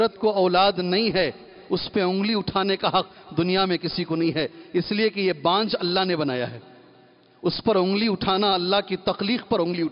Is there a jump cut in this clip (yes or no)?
no